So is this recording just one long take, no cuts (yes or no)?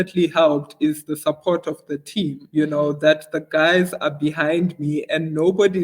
yes